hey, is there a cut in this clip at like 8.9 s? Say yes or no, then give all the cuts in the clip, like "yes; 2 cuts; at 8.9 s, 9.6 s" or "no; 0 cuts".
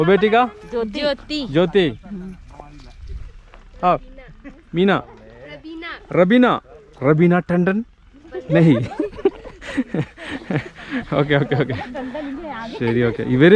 no; 0 cuts